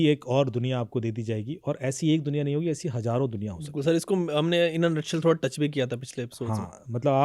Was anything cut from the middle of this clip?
no; 0 cuts

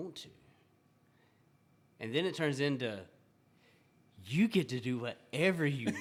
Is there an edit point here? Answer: no; 0 cuts

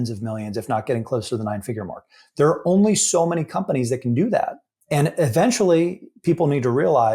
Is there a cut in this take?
yes; 1 cut; at 4.7 s

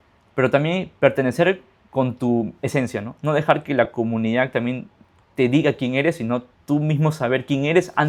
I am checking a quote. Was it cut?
no; 0 cuts

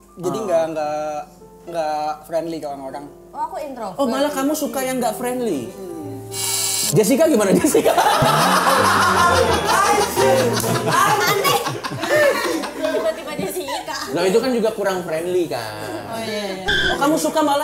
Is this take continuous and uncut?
yes; 0 cuts

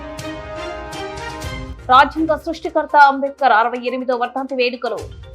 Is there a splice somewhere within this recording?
yes; 1 cut; at 1.7 s

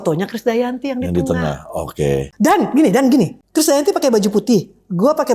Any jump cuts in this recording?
yes; 2 cuts; at 2.3 s, 3.4 s

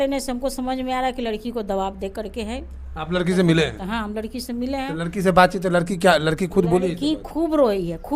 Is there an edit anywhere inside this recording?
no; 0 cuts

